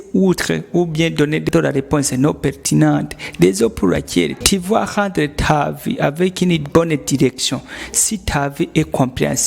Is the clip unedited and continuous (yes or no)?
no